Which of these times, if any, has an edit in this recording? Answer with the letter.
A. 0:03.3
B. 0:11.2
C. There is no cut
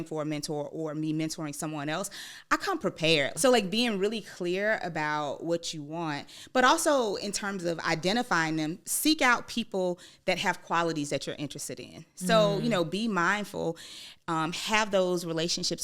A